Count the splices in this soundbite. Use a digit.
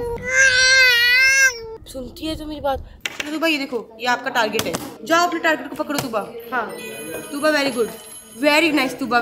1